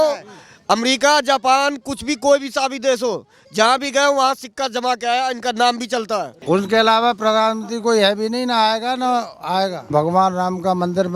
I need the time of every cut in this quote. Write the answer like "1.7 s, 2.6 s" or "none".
6.3 s, 9.9 s